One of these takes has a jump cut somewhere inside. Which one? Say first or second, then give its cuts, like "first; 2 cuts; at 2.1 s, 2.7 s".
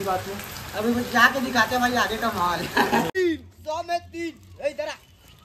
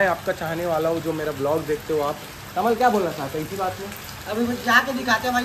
first; 1 cut; at 3.1 s